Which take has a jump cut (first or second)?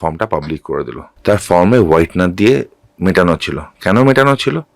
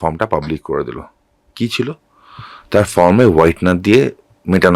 first